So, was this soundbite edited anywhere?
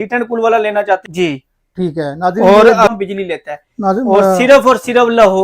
yes; 2 cuts; at 1.1 s, 2.9 s

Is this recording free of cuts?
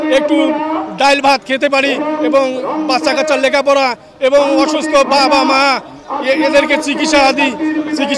yes; 0 cuts

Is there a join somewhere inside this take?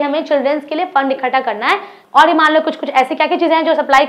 yes; 1 cut; at 2.0 s

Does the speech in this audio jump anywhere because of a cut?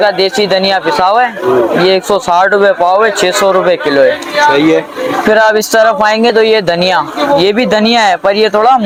no; 0 cuts

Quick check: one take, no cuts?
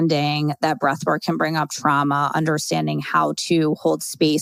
yes; 0 cuts

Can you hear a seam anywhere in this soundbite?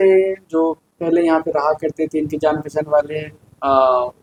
no; 0 cuts

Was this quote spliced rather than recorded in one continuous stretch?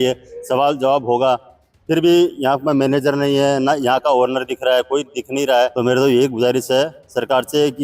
yes; 1 cut; at 5.7 s

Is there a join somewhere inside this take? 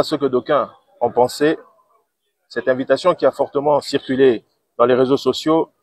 no; 0 cuts

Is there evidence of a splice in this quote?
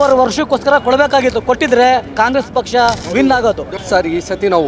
yes; 2 cuts; at 3.0 s, 3.7 s

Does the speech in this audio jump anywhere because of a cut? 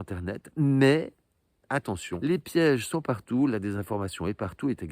yes; 1 cut; at 2.1 s

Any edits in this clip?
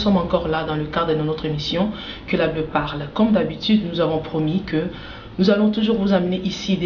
no; 0 cuts

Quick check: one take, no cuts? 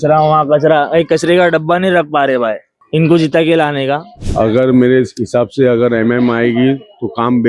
no; 2 cuts; at 2.7 s, 4.2 s

